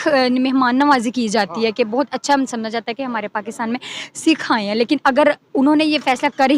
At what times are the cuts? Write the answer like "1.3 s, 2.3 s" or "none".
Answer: none